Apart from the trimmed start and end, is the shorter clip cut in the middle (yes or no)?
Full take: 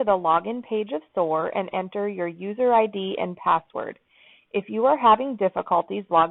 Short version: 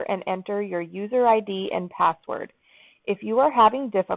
no